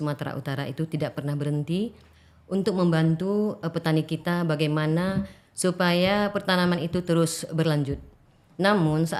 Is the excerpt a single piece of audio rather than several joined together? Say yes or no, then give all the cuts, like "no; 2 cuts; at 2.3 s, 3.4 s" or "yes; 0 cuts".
yes; 0 cuts